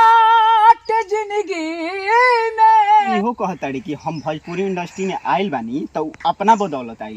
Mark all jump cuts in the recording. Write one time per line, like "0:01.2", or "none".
0:03.1